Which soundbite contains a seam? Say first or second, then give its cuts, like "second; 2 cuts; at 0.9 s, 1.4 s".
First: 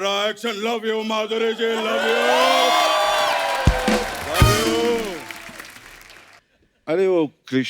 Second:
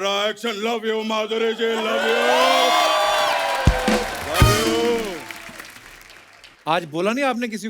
first; 1 cut; at 6.5 s